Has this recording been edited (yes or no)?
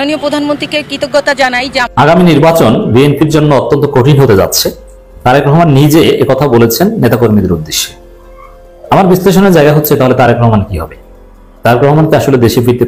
yes